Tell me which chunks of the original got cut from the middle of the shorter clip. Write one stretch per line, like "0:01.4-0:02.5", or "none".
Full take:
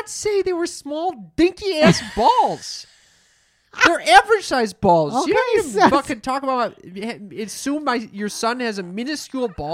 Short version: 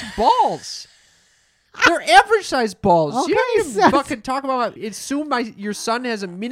0:06.8-0:07.4